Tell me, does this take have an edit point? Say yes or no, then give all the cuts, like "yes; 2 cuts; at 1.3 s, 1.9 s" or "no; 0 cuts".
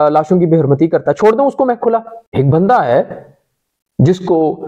yes; 1 cut; at 2.2 s